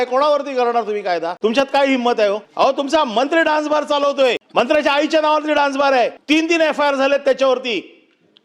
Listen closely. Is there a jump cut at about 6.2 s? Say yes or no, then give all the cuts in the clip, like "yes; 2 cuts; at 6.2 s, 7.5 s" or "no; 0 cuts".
yes; 4 cuts; at 1.3 s, 2.5 s, 4.4 s, 6.2 s